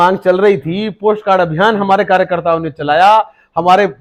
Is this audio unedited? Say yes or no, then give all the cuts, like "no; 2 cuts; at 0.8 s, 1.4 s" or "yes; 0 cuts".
yes; 0 cuts